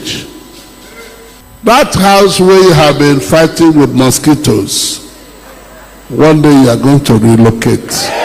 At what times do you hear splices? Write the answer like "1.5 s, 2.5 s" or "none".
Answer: 1.4 s